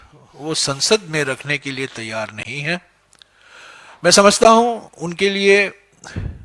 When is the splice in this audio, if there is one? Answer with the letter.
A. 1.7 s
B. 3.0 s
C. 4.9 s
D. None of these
D